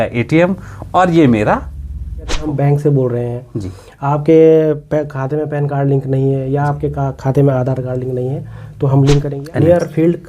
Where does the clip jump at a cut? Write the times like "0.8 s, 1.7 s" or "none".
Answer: 2.4 s, 9.3 s